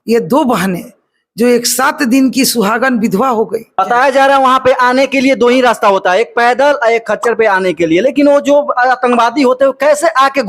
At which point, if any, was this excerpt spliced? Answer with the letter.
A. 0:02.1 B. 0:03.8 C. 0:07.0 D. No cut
B